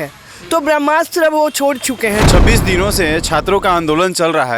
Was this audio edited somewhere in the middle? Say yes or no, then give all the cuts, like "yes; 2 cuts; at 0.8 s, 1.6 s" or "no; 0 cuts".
yes; 1 cut; at 2.3 s